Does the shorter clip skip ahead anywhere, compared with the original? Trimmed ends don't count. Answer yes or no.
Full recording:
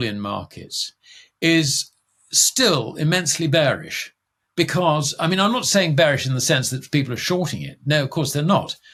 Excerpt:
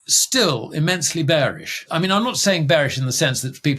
yes